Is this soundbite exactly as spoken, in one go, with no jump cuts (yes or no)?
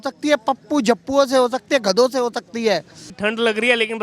no